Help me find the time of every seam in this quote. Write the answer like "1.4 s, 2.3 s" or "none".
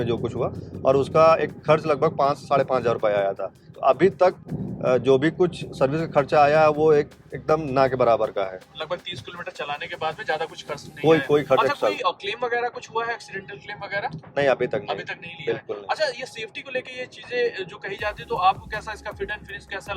none